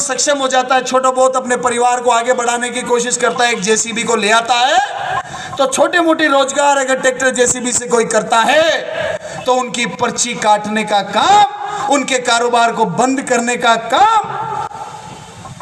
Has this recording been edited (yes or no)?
no